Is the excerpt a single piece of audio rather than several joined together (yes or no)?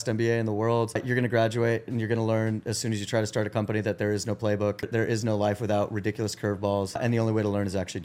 no